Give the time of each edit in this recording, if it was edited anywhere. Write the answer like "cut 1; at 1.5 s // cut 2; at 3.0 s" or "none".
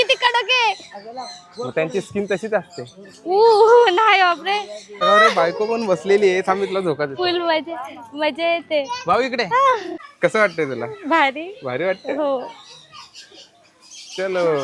cut 1; at 5.0 s // cut 2; at 10.0 s